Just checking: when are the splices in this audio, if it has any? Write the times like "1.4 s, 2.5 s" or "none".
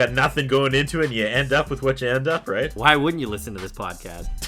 none

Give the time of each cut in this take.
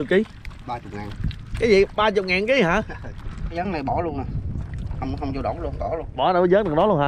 3.5 s

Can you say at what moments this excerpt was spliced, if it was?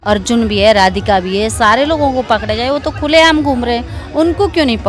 none

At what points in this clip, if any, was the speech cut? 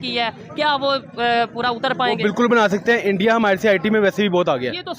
none

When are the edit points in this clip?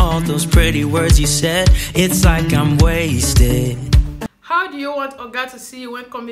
4.2 s

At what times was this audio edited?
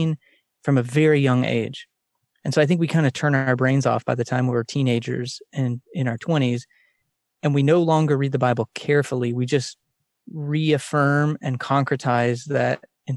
none

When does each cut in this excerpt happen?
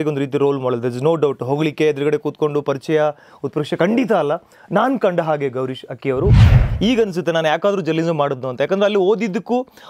6.4 s

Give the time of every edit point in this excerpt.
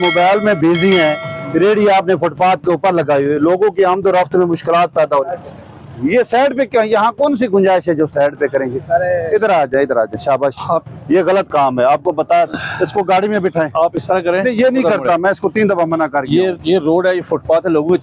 none

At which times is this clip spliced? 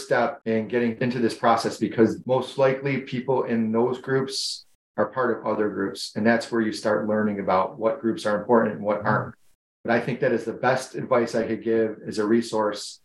0.9 s, 2.2 s

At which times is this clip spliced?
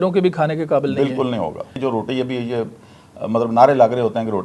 1.7 s

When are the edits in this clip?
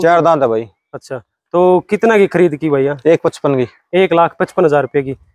none

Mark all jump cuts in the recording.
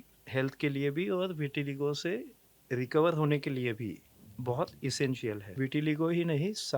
5.5 s

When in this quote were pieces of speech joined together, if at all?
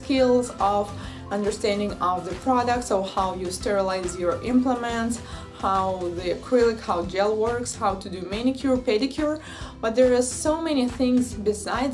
8.3 s

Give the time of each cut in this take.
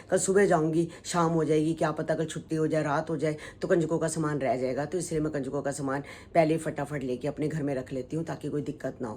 none

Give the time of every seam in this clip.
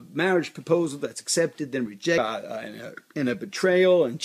2.2 s

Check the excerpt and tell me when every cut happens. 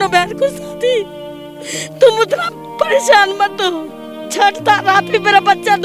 4.2 s

